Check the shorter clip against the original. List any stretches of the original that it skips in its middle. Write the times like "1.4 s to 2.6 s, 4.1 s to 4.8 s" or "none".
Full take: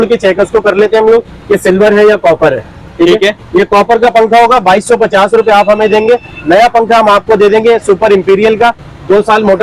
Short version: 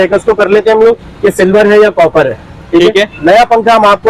3.4 s to 6.4 s

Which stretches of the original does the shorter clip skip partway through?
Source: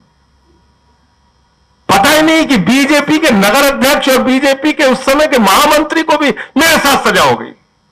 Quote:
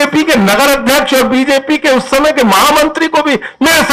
none

